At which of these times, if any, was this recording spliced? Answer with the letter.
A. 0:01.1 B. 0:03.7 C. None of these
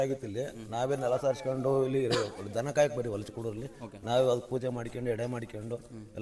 C